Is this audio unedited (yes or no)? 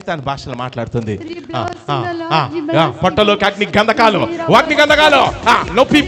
yes